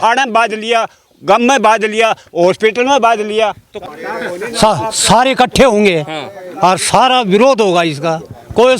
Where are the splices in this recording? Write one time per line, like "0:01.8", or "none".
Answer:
0:03.8

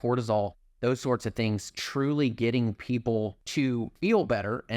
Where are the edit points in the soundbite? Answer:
0:03.8

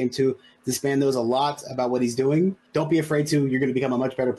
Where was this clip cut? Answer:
0:02.6

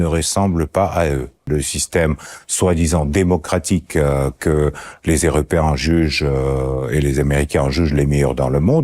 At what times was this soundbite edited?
0:01.5

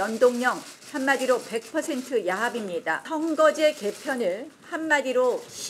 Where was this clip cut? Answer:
0:03.0

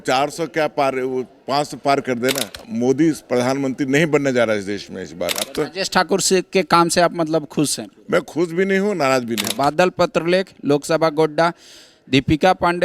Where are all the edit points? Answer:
0:02.6
0:05.5
0:09.5

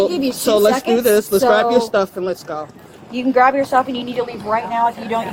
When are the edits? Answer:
none

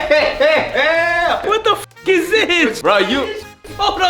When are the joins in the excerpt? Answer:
0:01.4
0:02.8

